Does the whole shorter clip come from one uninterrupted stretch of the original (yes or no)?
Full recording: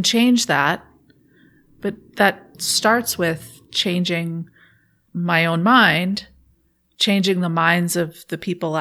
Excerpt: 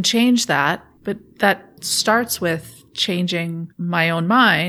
no